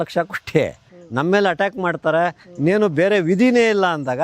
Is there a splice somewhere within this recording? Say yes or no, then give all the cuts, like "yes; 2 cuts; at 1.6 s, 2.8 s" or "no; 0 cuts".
yes; 1 cut; at 0.9 s